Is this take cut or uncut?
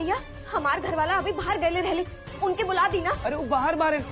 uncut